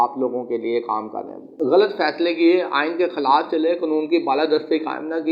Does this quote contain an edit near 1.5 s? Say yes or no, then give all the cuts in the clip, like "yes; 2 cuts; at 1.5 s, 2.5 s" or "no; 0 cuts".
yes; 1 cut; at 1.5 s